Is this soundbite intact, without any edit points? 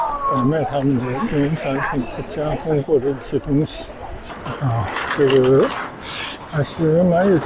no; 1 cut; at 4.3 s

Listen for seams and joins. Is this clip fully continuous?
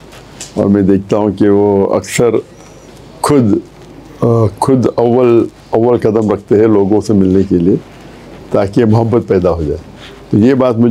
yes; 0 cuts

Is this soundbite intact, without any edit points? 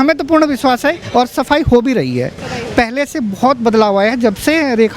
yes; 0 cuts

